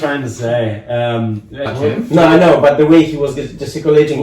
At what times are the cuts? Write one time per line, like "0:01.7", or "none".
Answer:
0:01.7

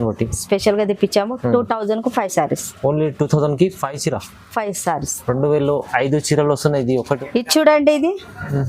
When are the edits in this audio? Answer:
0:07.2

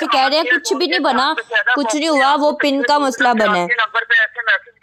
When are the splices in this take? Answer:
none

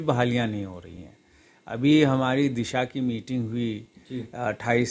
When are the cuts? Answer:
none

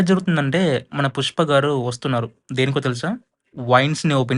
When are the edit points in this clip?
none

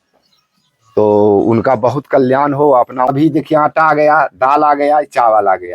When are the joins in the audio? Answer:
0:03.1

